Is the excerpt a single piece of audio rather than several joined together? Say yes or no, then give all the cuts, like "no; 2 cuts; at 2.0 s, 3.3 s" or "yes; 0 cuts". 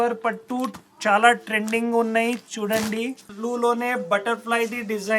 no; 1 cut; at 3.3 s